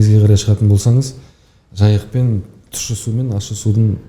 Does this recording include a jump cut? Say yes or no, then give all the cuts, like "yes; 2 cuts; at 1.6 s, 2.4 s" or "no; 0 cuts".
no; 0 cuts